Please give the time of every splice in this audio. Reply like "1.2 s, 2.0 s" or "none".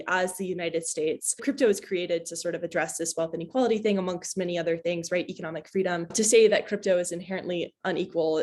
none